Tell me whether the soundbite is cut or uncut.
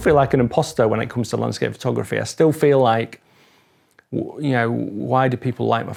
uncut